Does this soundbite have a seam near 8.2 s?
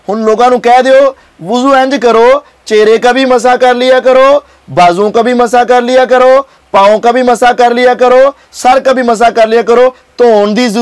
no; 0 cuts

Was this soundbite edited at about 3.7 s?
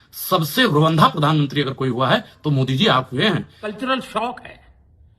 yes; 1 cut; at 3.7 s

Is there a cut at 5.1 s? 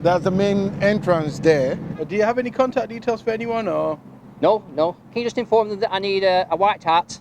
yes; 2 cuts; at 1.9 s, 5.1 s

